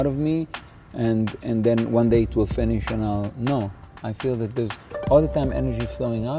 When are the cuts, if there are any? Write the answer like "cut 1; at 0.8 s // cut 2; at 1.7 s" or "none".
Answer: none